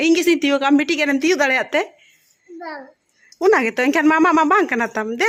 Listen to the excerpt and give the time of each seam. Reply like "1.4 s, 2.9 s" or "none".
none